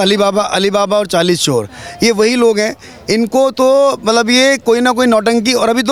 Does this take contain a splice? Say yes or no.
no